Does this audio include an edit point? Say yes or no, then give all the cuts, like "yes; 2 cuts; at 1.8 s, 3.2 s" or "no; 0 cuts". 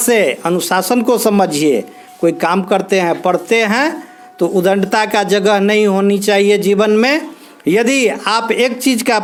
no; 0 cuts